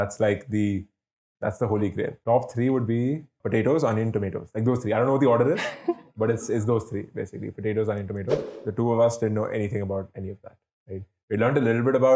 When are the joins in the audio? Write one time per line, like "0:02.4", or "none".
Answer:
0:02.2
0:03.4
0:08.5